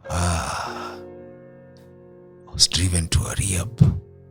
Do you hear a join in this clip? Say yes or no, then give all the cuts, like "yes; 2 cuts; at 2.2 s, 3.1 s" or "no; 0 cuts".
no; 0 cuts